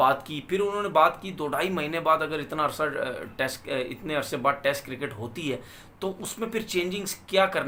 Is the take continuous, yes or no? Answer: yes